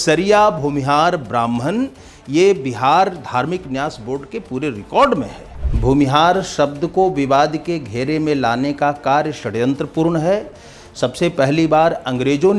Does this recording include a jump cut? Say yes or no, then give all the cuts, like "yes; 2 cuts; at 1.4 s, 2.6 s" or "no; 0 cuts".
yes; 1 cut; at 5.7 s